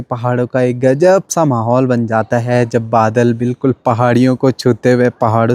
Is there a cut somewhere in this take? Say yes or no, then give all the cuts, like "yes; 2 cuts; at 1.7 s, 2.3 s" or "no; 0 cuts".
no; 0 cuts